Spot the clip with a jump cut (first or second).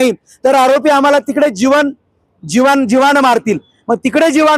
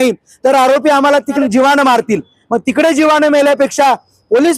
second